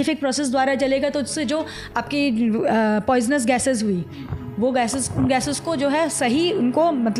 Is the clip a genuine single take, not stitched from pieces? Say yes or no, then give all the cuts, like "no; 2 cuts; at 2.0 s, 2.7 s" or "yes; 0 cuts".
yes; 0 cuts